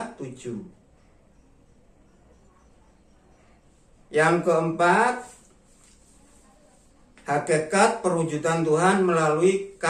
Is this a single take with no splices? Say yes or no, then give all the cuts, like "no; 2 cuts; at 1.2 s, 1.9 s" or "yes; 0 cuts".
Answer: yes; 0 cuts